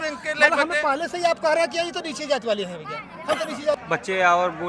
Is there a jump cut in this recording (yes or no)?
yes